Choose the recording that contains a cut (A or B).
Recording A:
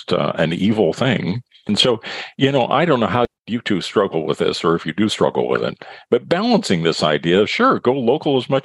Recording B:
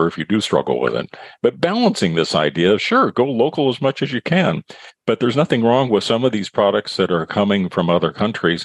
A